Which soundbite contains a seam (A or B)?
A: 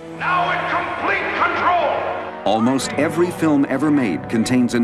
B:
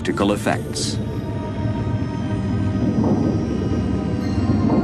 A